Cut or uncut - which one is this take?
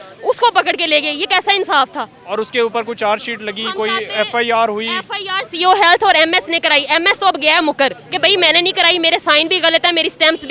uncut